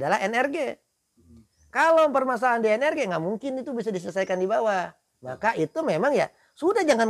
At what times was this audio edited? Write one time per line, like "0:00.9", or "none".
none